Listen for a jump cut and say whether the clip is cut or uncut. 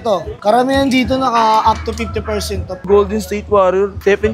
cut